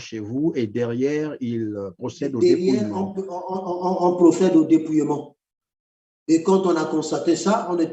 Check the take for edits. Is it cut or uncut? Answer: uncut